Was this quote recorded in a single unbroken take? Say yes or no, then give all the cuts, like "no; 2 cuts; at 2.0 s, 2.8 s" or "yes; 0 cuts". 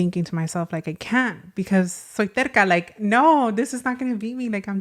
yes; 0 cuts